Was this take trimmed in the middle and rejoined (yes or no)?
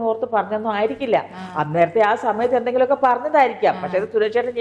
no